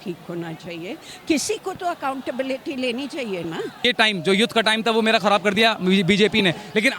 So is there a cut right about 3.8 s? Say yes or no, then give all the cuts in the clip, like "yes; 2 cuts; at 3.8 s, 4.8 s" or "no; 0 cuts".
yes; 1 cut; at 3.8 s